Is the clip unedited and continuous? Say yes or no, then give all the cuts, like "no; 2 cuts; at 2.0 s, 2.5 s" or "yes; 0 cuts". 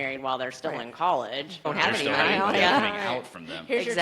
no; 1 cut; at 1.7 s